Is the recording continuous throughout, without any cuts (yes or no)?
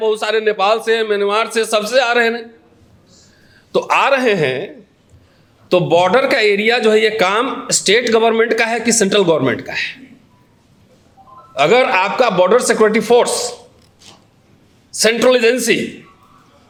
yes